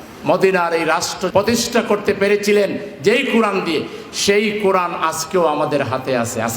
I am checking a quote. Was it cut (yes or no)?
yes